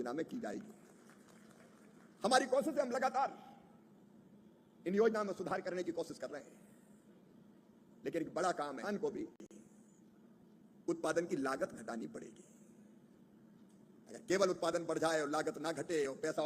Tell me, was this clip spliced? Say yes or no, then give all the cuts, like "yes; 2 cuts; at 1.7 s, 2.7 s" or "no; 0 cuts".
yes; 1 cut; at 8.8 s